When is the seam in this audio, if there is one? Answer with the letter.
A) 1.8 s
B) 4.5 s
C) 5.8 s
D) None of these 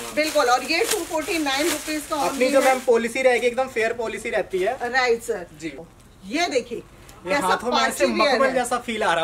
C